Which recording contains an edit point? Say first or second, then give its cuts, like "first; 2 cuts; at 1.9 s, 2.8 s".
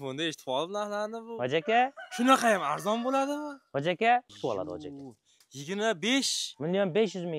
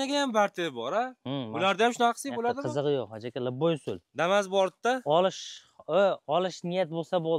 first; 1 cut; at 4.3 s